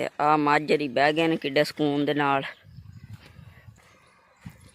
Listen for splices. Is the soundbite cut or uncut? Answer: cut